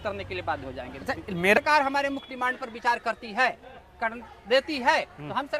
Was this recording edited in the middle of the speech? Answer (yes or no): yes